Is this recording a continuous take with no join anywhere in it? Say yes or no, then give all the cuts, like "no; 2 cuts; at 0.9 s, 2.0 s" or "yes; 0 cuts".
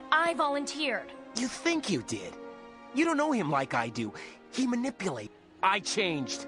no; 1 cut; at 5.3 s